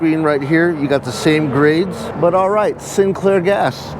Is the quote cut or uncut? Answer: cut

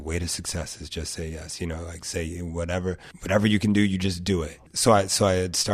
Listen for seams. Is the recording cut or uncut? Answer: cut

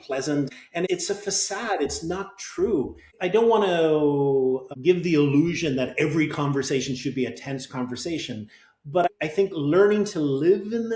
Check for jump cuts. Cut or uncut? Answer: cut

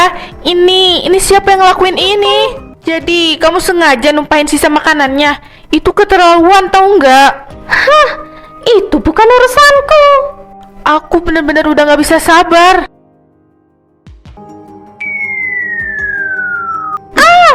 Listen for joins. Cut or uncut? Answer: cut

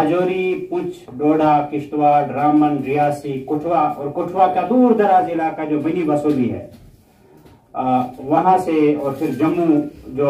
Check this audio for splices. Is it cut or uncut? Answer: uncut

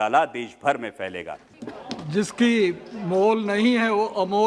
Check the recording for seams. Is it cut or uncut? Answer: cut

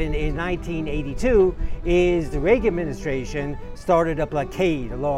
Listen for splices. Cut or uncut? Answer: uncut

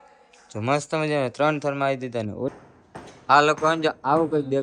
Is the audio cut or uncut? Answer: cut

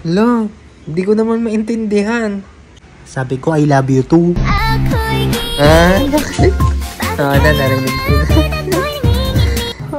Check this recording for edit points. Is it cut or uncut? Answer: uncut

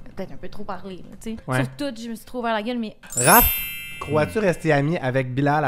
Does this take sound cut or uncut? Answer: cut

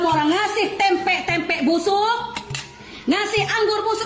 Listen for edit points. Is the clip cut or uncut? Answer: uncut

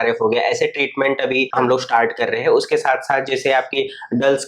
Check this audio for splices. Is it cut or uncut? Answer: cut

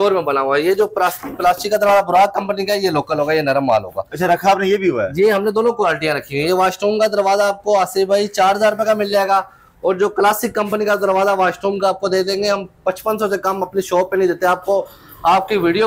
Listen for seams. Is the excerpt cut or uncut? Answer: uncut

